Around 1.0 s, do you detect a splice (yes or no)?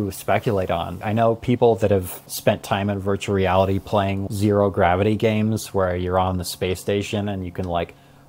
yes